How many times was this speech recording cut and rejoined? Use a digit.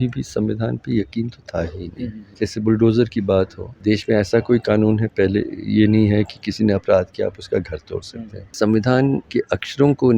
4